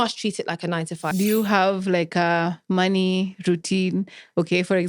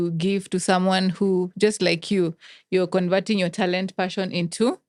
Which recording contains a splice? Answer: first; 1 cut; at 1.1 s

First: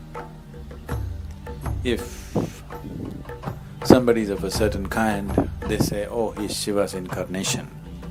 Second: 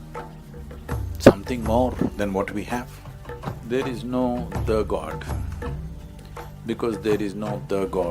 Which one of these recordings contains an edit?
second; 1 cut; at 1.2 s

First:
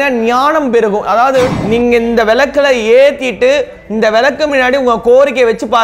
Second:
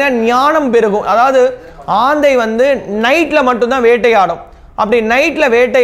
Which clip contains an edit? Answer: first; 1 cut; at 1.6 s

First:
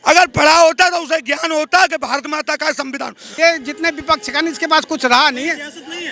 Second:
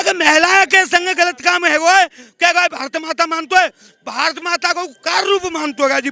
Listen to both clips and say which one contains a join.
first; 1 cut; at 3.2 s

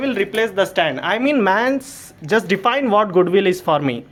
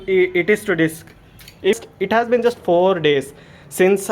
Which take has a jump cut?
second; 1 cut; at 1.9 s

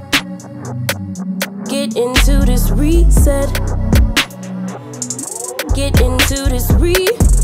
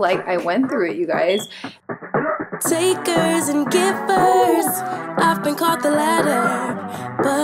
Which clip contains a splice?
second; 1 cut; at 1.7 s

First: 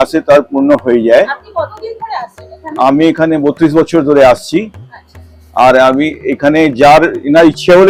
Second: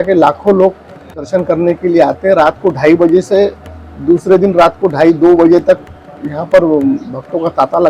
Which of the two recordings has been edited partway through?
second; 1 cut; at 1.2 s

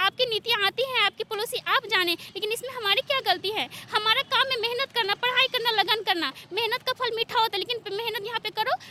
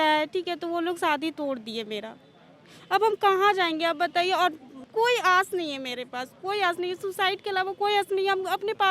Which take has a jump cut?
second; 1 cut; at 4.8 s

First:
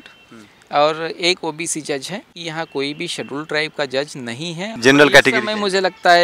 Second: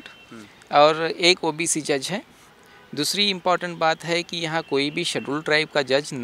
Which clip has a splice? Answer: first; 2 cuts; at 2.4 s, 4.8 s

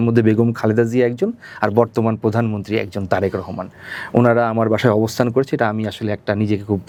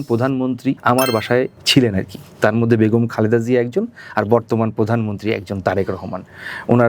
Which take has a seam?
second; 2 cuts; at 0.8 s, 1.6 s

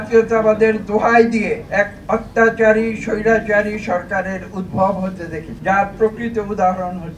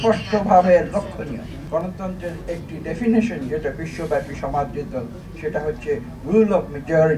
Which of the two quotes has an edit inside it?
second; 1 cut; at 1.5 s

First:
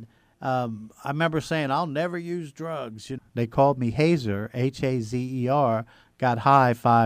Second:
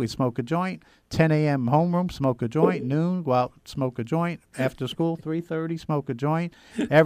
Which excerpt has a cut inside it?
first; 1 cut; at 3.2 s

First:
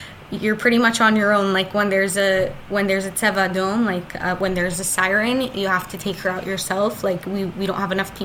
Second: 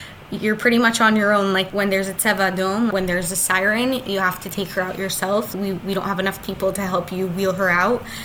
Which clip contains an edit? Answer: second; 3 cuts; at 1.7 s, 2.9 s, 5.5 s

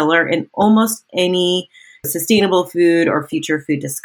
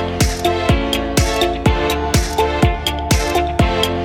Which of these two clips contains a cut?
first; 1 cut; at 2.1 s

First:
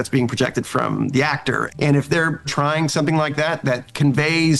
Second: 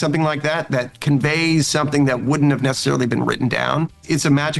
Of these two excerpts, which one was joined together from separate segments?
first; 1 cut; at 1.6 s

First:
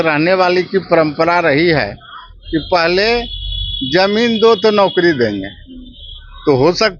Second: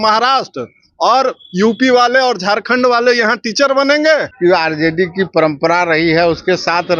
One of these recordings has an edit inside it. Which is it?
second; 1 cut; at 4.3 s

